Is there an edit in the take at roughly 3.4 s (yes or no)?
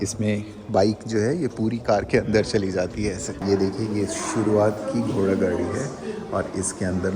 yes